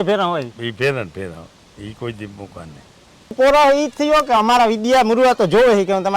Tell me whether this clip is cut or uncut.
cut